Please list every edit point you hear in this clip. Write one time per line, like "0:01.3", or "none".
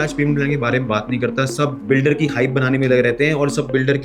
0:01.8